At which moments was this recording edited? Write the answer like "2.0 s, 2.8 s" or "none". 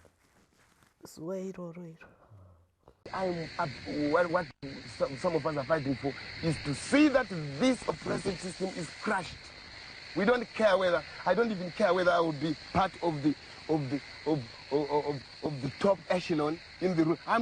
2.9 s